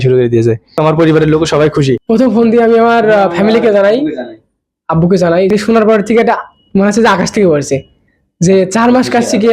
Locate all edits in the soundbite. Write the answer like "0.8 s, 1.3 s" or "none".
0.8 s, 2.0 s, 5.5 s